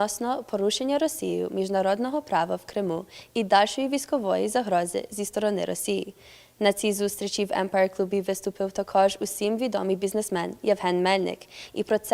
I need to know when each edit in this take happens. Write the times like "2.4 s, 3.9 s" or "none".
none